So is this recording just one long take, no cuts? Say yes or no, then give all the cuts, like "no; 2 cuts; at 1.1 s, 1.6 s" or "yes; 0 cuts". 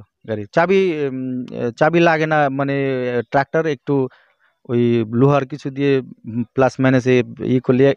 yes; 0 cuts